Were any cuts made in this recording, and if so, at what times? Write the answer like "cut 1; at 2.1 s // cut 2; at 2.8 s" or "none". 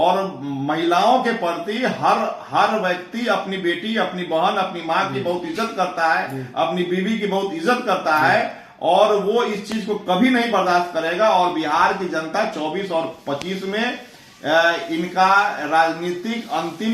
none